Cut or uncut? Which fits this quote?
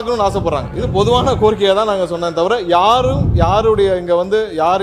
uncut